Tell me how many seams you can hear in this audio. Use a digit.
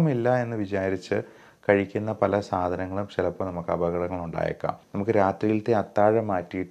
1